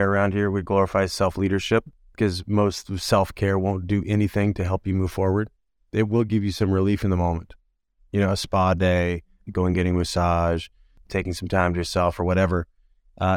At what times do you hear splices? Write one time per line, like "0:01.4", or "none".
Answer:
0:02.0
0:10.9